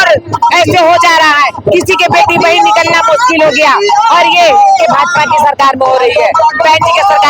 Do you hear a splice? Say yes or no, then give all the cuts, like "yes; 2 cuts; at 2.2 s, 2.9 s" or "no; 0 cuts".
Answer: no; 0 cuts